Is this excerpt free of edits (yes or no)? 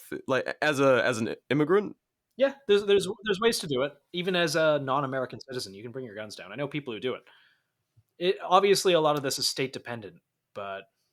no